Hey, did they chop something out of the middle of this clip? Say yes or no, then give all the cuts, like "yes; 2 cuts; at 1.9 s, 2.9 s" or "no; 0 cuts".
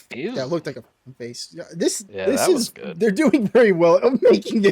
yes; 1 cut; at 2.1 s